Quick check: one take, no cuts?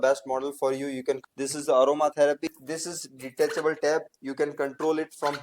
no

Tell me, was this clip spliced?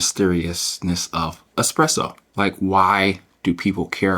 yes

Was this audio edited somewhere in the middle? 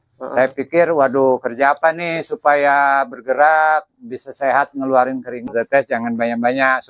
yes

